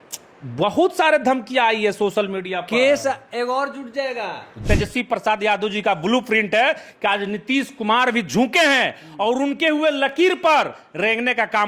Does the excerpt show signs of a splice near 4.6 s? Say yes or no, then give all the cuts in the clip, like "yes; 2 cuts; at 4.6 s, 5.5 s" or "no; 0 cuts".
yes; 1 cut; at 4.6 s